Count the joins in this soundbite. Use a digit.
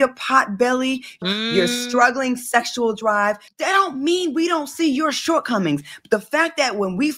2